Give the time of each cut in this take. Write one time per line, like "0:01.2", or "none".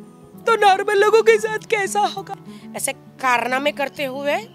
0:02.3